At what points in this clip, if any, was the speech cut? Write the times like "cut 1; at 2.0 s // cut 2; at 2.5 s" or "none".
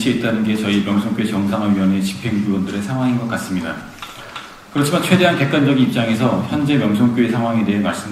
none